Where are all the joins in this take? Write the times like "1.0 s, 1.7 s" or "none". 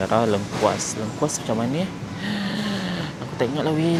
none